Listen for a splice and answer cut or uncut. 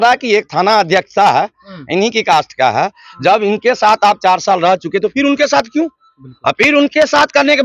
uncut